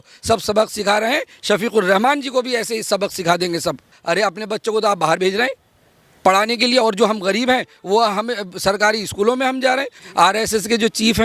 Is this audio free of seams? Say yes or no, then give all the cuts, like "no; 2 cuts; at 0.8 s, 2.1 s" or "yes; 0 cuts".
no; 2 cuts; at 4.0 s, 10.0 s